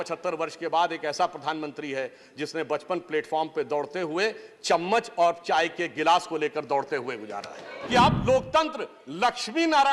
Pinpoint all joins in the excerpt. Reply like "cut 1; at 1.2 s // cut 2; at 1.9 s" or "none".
cut 1; at 7.7 s